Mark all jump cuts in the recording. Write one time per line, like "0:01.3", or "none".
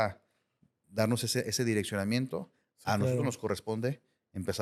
none